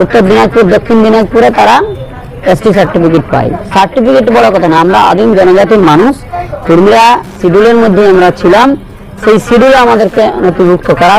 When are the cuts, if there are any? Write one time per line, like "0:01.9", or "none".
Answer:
none

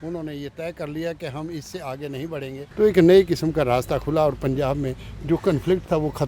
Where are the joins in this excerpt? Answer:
0:02.6

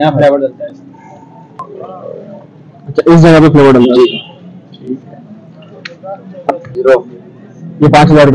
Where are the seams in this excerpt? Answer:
0:01.7
0:06.6

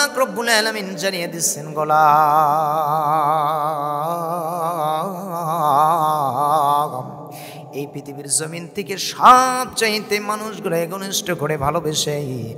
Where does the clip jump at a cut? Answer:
none

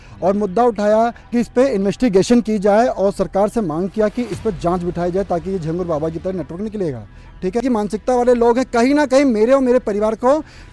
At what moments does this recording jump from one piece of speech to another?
0:07.6

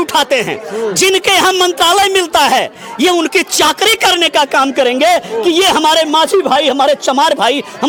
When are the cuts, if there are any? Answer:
none

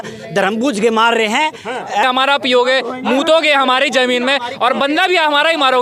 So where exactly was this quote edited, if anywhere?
0:02.0

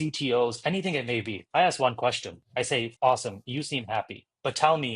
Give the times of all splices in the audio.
0:01.4
0:02.8

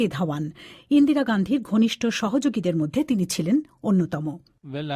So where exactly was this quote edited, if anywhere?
0:02.2

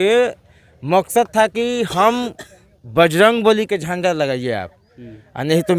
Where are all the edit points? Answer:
none

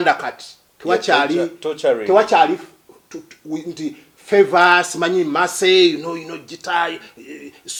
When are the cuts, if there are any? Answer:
none

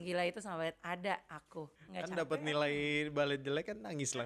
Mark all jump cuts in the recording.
0:01.7

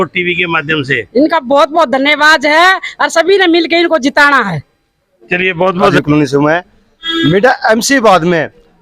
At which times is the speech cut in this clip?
0:05.9

